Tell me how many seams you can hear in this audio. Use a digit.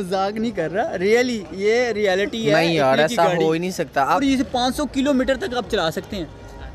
1